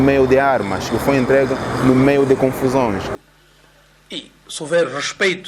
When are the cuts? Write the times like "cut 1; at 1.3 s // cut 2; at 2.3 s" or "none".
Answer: cut 1; at 3.1 s